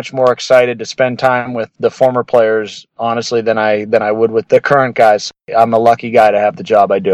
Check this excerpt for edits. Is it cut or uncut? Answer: uncut